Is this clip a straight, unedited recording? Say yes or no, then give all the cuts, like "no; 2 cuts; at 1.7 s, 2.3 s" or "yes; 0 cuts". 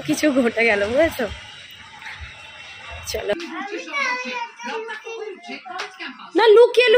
no; 1 cut; at 3.3 s